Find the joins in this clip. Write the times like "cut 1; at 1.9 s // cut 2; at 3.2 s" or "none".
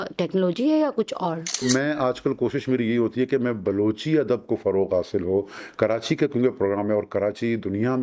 cut 1; at 1.6 s